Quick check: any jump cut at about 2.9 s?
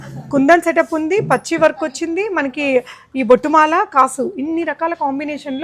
no; 0 cuts

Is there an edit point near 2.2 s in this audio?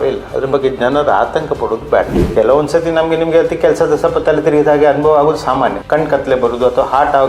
yes; 2 cuts; at 2.2 s, 5.8 s

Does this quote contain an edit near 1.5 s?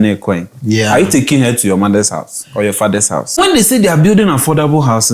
no; 1 cut; at 3.4 s

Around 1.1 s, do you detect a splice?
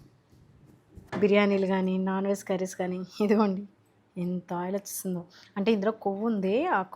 yes; 1 cut; at 1.1 s

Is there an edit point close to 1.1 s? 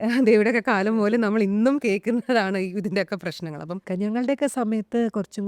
no; 1 cut; at 3.8 s

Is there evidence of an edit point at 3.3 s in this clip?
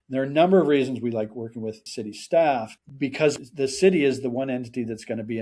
yes; 1 cut; at 3.3 s

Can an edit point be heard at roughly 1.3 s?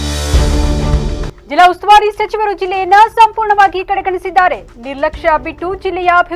yes; 1 cut; at 1.3 s

